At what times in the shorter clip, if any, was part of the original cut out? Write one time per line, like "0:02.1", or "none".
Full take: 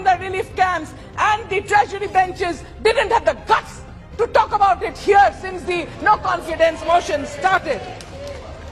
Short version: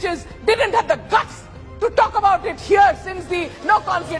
none